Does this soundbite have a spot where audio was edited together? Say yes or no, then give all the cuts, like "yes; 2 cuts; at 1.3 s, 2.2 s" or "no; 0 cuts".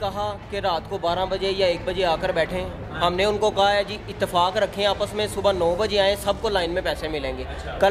no; 0 cuts